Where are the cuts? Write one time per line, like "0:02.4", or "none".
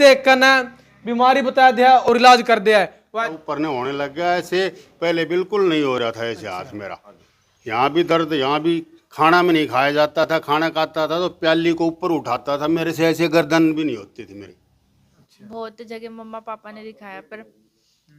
0:03.2
0:15.2